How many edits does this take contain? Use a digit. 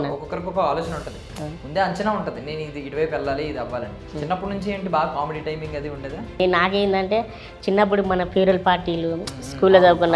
1